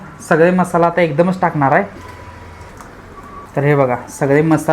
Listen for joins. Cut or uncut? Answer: uncut